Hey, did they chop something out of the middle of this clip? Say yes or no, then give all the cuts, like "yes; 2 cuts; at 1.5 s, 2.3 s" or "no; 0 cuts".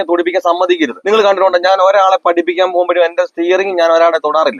yes; 1 cut; at 1.0 s